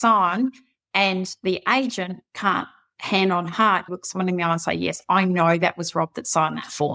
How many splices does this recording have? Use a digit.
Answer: 0